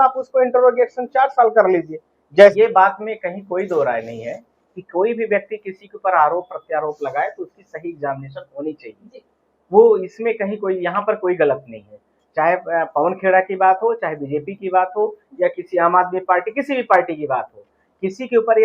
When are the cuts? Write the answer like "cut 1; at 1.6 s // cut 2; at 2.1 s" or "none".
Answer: cut 1; at 2.5 s